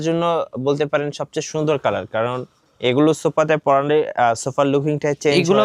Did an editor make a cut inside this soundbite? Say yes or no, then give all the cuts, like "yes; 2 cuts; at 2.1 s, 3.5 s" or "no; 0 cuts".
no; 0 cuts